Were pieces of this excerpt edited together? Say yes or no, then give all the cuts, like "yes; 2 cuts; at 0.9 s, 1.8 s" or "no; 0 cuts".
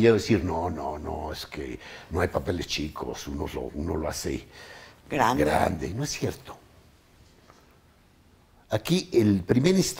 no; 0 cuts